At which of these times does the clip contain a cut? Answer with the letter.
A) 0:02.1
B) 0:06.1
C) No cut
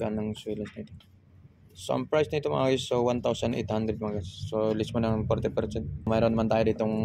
B